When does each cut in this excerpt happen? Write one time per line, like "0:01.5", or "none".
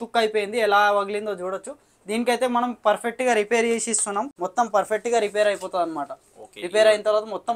0:04.3